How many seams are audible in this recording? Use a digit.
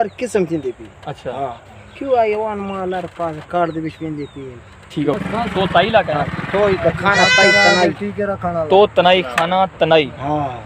1